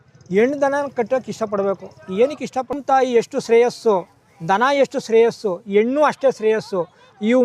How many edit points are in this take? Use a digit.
1